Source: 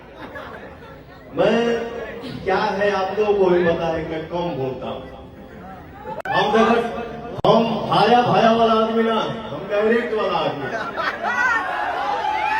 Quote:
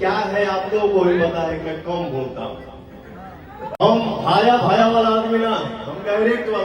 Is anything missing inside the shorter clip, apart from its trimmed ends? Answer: yes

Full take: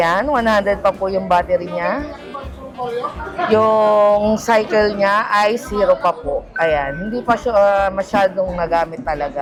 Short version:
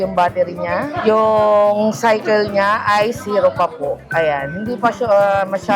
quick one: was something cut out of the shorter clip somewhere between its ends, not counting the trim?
yes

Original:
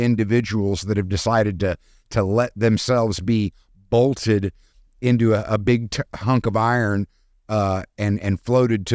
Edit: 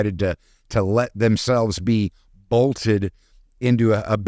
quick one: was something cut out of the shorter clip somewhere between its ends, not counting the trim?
no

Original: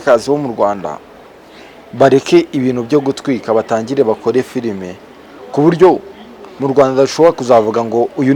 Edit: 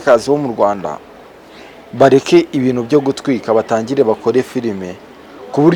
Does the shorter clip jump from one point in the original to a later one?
no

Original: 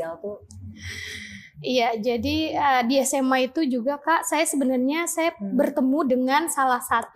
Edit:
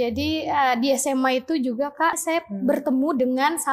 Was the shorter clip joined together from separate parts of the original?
yes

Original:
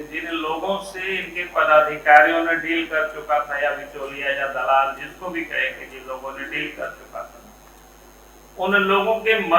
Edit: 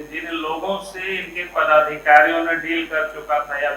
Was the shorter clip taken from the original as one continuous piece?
yes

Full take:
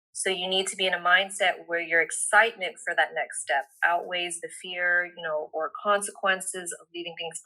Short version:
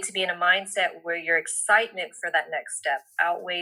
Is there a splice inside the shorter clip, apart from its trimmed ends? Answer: no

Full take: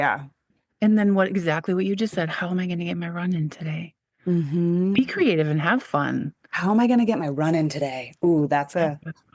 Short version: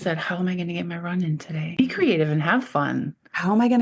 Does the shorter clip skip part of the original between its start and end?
yes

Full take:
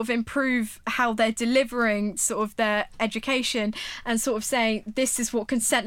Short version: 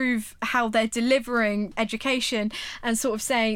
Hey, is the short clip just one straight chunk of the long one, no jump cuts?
no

